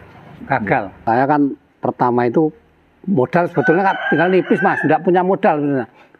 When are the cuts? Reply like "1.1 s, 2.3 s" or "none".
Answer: 0.9 s